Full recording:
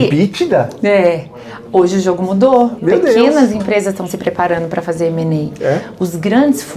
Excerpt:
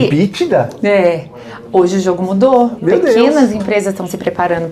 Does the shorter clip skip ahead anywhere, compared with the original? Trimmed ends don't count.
no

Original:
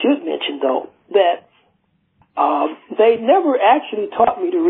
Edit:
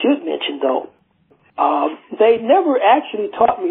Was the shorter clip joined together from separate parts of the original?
yes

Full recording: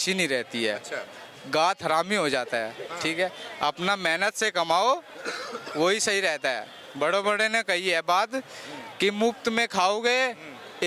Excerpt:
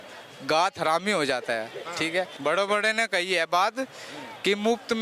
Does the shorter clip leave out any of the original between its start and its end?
yes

